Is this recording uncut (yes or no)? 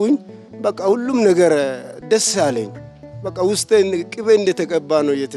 yes